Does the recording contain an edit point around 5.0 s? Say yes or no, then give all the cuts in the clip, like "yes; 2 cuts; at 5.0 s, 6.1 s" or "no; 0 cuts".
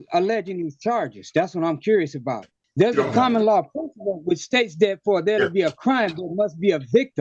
no; 1 cut; at 2.5 s